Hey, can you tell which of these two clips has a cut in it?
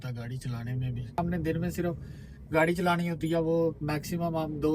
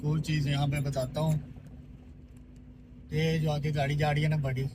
first; 1 cut; at 1.2 s

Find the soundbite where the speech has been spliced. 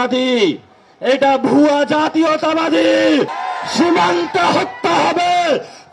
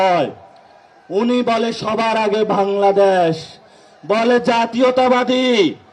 first; 1 cut; at 3.4 s

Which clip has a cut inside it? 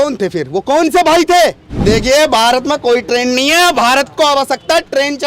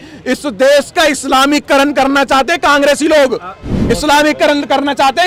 first; 1 cut; at 1.7 s

